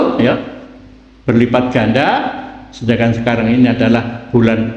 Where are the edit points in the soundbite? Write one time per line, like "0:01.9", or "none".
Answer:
none